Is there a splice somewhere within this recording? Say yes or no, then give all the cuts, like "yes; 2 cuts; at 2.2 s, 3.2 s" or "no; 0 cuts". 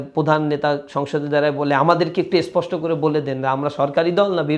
no; 0 cuts